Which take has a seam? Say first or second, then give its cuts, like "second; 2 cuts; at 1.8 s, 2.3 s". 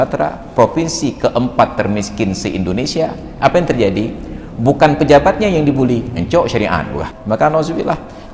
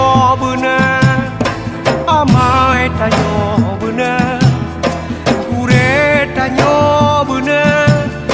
first; 1 cut; at 7.1 s